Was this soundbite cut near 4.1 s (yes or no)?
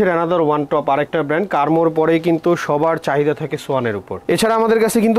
yes